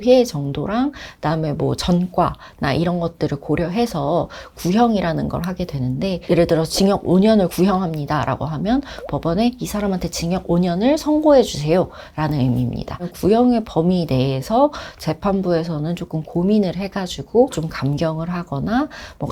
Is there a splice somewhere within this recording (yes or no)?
no